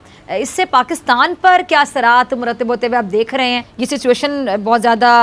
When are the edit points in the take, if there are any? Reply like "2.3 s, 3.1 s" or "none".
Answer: 3.7 s